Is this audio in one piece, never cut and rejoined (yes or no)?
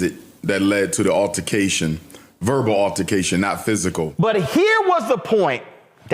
no